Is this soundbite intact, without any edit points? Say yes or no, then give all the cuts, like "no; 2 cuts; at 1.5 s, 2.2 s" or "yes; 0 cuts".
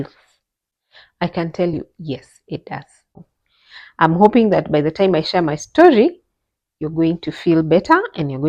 no; 1 cut; at 3.3 s